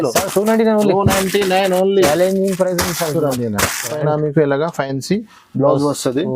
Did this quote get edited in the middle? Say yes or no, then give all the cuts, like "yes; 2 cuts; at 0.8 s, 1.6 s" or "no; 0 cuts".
yes; 1 cut; at 4.0 s